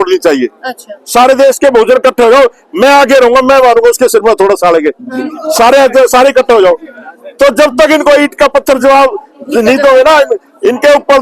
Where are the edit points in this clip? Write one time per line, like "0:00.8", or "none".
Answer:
none